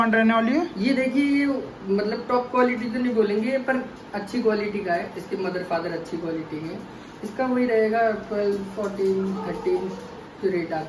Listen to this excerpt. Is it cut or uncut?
uncut